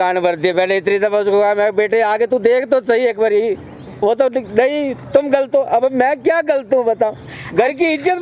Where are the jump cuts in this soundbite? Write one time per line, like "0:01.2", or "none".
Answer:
none

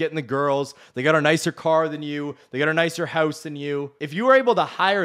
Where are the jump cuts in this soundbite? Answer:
0:04.0

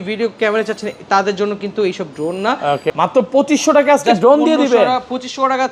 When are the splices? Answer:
0:02.9

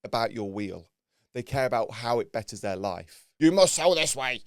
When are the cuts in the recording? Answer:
0:03.2

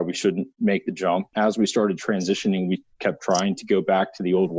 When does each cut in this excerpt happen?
0:01.3

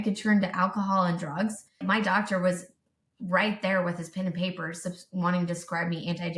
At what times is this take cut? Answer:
0:01.8

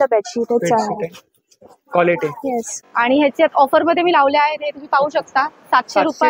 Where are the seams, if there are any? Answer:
0:02.7

